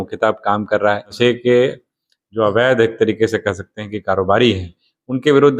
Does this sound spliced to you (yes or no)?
yes